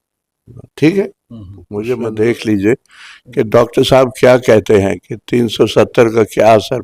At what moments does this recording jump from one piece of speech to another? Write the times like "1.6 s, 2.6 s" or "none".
2.1 s